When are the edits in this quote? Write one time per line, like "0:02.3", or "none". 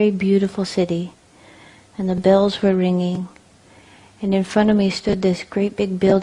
0:01.9